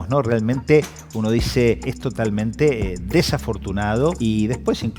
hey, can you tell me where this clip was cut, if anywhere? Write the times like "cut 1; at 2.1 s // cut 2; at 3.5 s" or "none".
cut 1; at 1.9 s // cut 2; at 4.2 s